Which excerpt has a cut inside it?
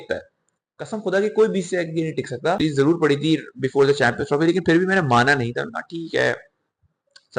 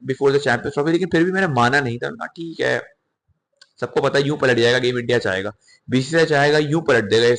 first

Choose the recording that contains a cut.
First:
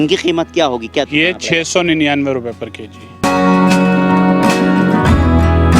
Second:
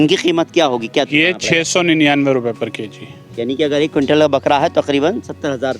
first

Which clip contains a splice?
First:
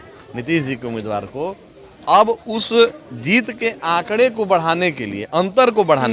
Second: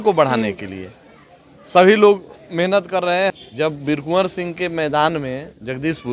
second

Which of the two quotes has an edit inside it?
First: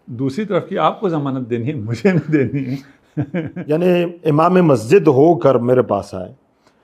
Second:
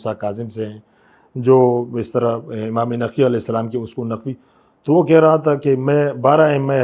first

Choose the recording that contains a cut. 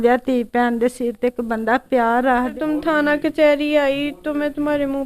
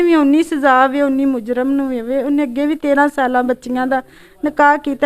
first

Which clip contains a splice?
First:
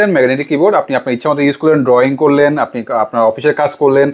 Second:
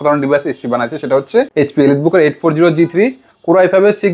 second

